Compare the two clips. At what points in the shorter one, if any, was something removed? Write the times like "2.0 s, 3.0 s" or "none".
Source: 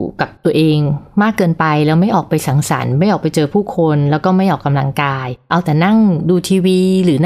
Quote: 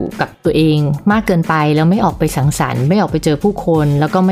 0.9 s